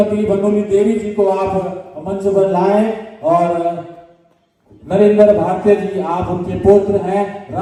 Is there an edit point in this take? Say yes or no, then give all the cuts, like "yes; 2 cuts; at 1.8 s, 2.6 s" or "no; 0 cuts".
no; 0 cuts